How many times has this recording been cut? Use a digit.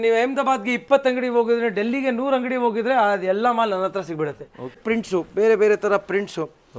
1